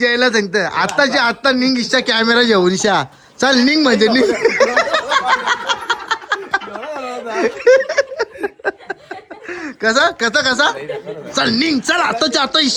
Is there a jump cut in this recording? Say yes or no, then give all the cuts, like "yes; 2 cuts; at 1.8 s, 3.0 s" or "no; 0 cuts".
no; 0 cuts